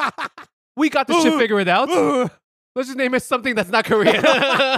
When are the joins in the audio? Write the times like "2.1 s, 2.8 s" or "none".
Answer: none